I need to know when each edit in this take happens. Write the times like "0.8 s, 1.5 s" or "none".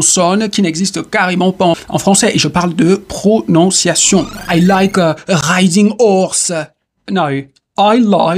1.7 s, 4.4 s